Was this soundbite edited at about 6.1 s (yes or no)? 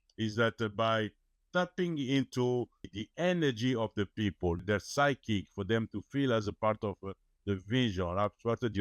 no